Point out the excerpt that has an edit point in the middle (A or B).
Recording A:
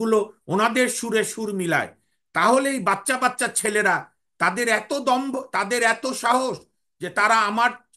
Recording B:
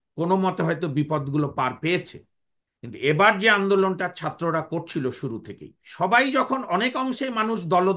B